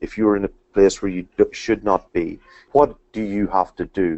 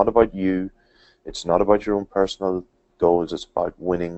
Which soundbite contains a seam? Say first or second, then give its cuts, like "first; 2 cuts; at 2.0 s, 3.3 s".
first; 1 cut; at 2.5 s